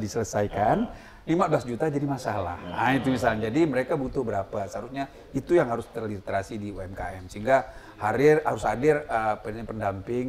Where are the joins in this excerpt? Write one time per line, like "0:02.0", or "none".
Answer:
none